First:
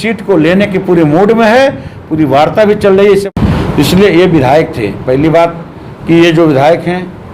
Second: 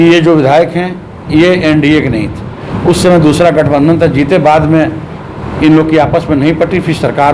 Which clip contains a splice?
first; 1 cut; at 3.3 s

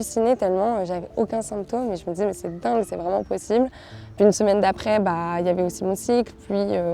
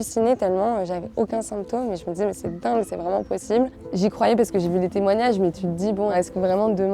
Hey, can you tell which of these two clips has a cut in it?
second; 2 cuts; at 3.8 s, 6.1 s

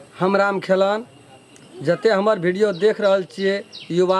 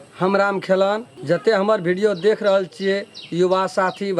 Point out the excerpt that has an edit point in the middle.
second; 1 cut; at 1.1 s

